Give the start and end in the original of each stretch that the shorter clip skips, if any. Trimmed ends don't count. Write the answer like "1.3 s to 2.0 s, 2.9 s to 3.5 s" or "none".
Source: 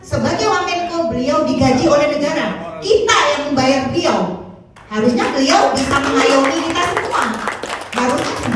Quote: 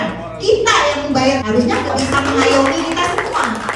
4.3 s to 5.7 s